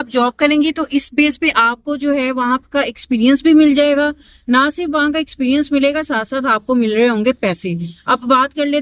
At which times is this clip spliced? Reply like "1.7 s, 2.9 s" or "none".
none